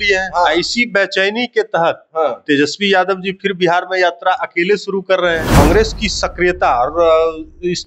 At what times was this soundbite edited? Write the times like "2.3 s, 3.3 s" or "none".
5.6 s